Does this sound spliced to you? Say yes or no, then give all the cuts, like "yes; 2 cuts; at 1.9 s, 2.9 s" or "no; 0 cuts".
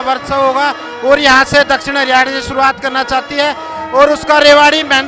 no; 0 cuts